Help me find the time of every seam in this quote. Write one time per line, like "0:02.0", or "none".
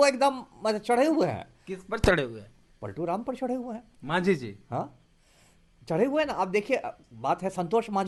none